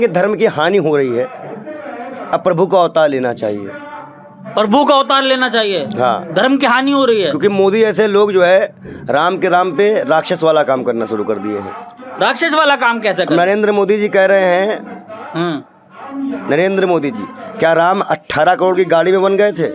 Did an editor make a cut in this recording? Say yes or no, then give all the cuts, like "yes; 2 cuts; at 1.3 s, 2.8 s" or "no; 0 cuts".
no; 0 cuts